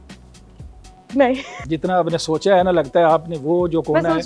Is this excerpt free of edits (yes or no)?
yes